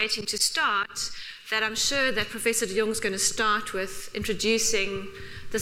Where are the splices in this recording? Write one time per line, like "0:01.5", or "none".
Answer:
none